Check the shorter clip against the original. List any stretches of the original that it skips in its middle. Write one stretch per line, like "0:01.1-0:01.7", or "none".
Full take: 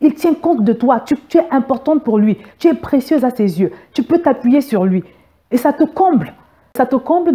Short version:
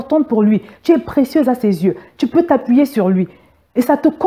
none